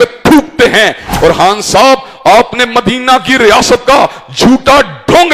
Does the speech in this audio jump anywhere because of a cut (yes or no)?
yes